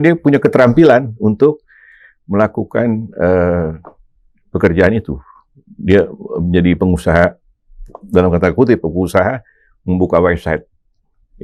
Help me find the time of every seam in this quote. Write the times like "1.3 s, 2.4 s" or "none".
none